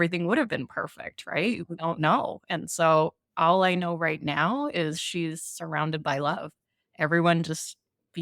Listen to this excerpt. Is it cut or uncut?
cut